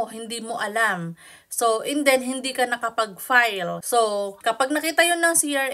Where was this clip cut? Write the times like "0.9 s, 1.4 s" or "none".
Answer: 3.8 s, 4.3 s